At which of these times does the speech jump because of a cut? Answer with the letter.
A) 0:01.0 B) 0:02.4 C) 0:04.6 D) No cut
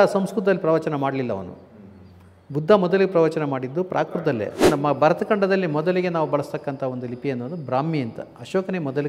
C